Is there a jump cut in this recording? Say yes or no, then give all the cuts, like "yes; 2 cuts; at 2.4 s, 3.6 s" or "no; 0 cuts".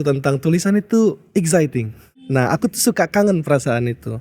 yes; 1 cut; at 2.5 s